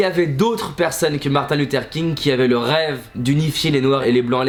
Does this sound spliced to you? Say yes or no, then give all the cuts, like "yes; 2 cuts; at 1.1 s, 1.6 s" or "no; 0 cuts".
no; 0 cuts